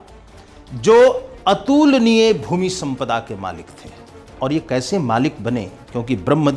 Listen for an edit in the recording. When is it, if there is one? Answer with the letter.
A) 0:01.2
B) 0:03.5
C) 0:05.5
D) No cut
D